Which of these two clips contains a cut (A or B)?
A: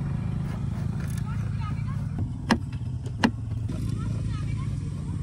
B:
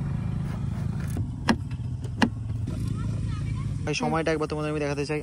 B